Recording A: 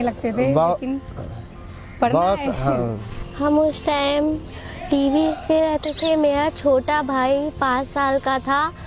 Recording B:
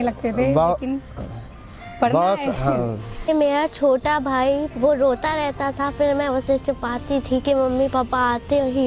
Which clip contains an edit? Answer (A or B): B